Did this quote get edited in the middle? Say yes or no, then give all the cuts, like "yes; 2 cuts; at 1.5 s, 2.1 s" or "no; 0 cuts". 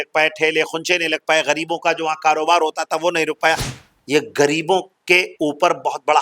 yes; 1 cut; at 3.7 s